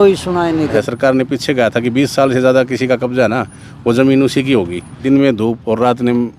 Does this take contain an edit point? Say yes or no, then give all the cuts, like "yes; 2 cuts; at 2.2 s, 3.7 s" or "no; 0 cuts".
yes; 2 cuts; at 0.8 s, 4.9 s